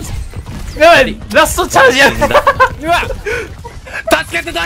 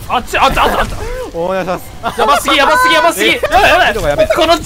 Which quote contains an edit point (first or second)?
second